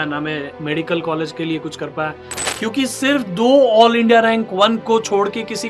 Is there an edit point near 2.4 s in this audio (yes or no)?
yes